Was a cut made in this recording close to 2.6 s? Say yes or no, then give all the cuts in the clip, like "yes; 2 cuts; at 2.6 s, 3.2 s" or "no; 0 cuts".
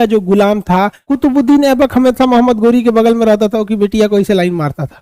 no; 1 cut; at 1.0 s